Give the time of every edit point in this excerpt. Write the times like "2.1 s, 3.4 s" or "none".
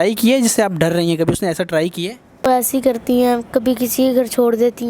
2.4 s